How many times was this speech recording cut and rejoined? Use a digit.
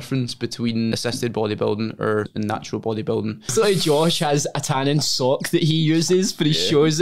3